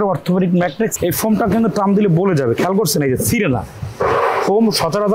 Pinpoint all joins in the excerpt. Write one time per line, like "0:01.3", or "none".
0:00.9